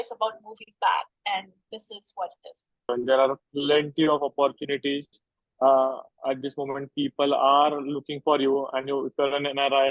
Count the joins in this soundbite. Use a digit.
1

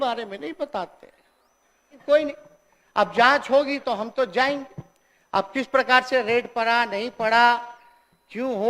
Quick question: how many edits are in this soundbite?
1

